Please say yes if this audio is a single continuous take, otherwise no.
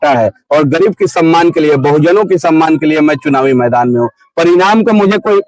yes